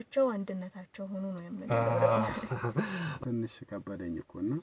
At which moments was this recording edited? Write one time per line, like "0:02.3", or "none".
0:03.1

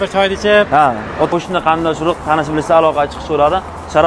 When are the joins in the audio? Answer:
0:01.3

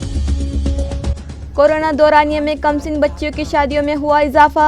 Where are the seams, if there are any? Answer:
0:01.3

